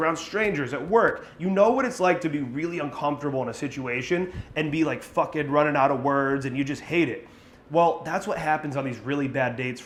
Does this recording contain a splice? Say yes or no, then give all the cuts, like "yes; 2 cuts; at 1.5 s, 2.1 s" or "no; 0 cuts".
no; 0 cuts